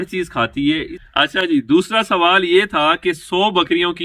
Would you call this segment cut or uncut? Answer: cut